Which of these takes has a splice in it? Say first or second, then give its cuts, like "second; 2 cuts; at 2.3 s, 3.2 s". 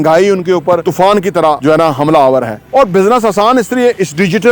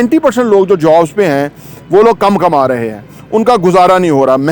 first; 3 cuts; at 0.8 s, 1.6 s, 2.6 s